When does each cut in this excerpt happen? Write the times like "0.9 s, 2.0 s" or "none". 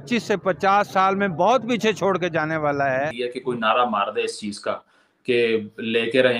3.1 s

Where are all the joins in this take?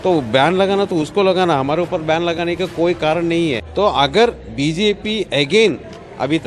3.6 s

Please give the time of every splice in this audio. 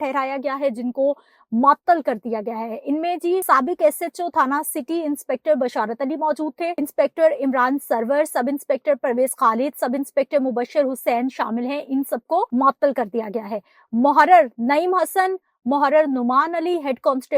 3.4 s, 6.8 s, 12.5 s

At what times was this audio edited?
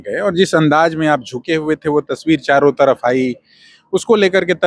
none

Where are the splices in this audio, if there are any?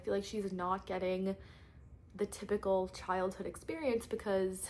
none

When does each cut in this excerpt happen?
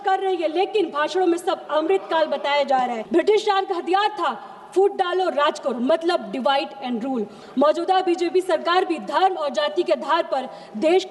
3.0 s, 7.4 s

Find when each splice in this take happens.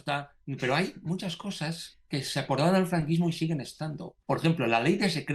4.1 s

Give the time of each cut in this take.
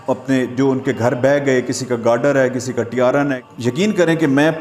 3.4 s

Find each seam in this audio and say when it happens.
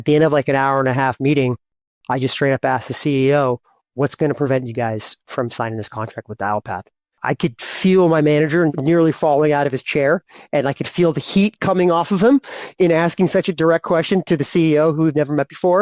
7.2 s, 8.7 s

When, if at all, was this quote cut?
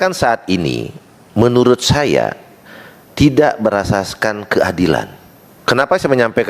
5.5 s

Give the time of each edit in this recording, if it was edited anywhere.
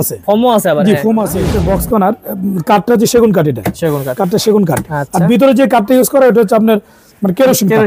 1.5 s

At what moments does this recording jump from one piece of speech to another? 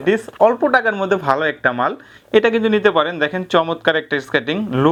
none

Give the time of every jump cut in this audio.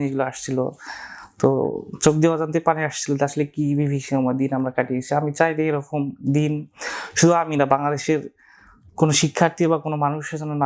none

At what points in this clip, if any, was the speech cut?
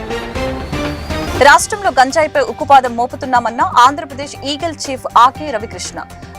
1.2 s

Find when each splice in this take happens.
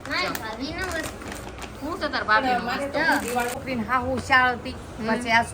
3.6 s

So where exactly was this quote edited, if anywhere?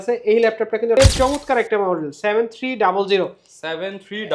1.0 s

